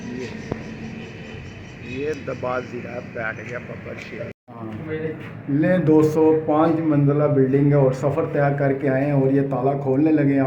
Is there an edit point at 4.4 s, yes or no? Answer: yes